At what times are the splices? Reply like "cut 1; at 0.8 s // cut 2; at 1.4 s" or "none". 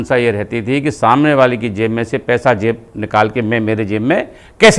none